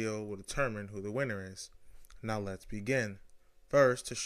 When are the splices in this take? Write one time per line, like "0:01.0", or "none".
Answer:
0:01.9